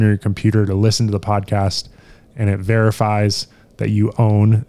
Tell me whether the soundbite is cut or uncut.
uncut